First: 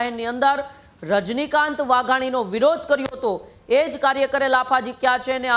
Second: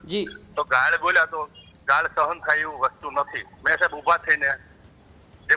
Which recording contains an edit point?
second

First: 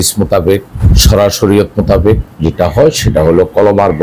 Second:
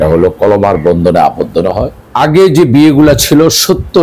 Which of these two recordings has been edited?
second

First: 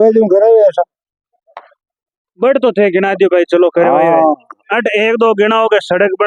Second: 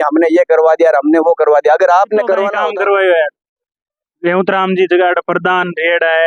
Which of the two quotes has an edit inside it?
second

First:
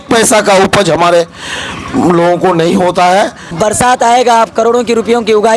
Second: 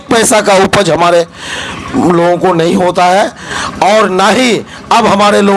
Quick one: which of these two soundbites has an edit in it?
first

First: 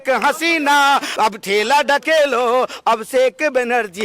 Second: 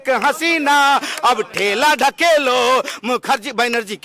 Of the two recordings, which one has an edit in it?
first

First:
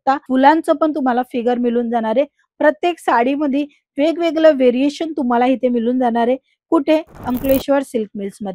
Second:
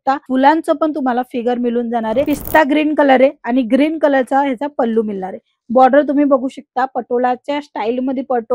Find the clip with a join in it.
second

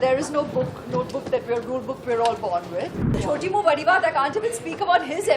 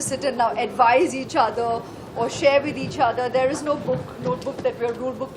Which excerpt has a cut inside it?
first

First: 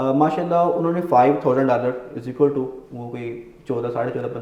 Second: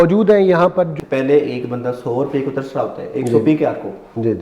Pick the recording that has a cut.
second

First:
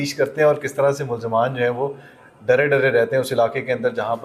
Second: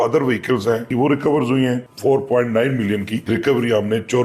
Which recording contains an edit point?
second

